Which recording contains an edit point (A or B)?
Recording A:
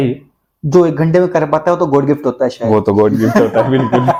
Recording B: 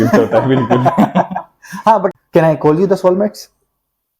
B